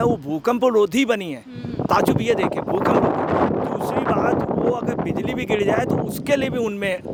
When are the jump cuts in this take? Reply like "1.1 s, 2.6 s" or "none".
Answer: none